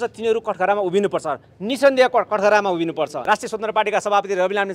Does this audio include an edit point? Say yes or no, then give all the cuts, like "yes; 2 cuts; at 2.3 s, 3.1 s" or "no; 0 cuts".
yes; 1 cut; at 3.2 s